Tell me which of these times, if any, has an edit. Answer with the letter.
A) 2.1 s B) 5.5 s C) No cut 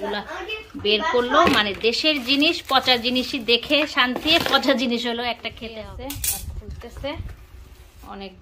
B